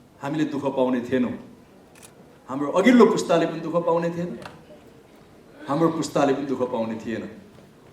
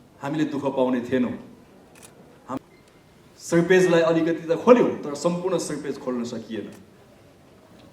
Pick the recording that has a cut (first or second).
second